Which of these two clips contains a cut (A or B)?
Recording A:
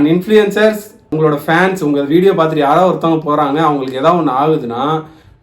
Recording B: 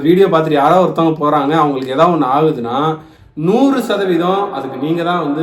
A